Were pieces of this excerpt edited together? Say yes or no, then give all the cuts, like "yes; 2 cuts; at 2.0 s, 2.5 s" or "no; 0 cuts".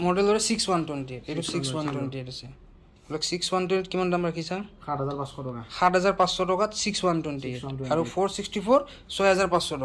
no; 0 cuts